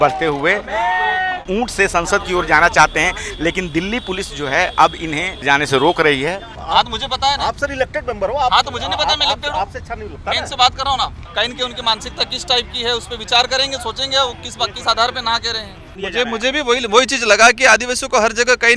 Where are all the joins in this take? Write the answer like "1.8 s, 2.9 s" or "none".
1.5 s, 5.4 s, 6.5 s, 11.2 s, 16.0 s